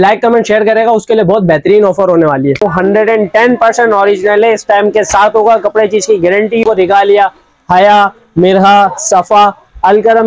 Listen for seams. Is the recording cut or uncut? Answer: cut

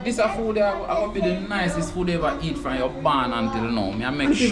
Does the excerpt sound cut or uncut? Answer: uncut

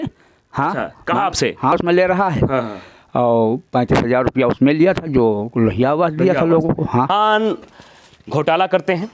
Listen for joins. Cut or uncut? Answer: cut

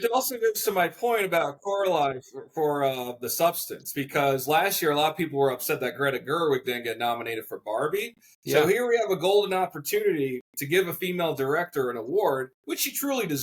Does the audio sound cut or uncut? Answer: uncut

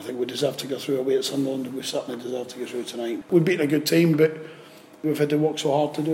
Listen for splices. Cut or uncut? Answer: cut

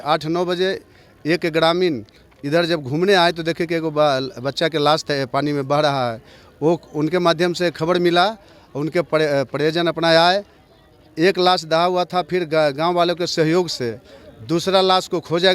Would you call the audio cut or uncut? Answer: uncut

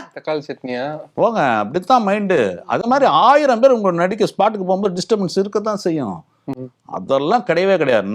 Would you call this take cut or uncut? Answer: uncut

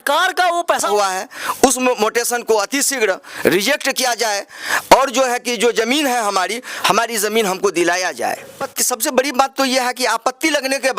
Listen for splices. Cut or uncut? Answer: cut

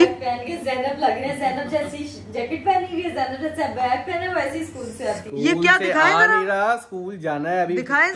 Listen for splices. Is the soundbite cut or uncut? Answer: uncut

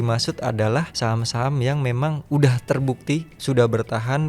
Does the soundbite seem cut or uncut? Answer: cut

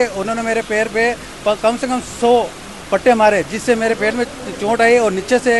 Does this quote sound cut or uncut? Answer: uncut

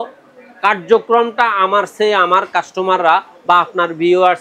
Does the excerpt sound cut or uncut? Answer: uncut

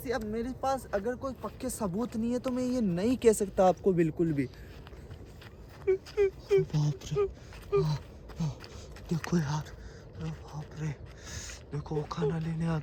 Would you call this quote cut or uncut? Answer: uncut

